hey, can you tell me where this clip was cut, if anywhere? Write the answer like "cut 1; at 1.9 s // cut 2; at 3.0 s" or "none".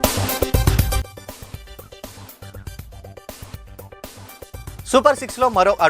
cut 1; at 1.1 s // cut 2; at 4.8 s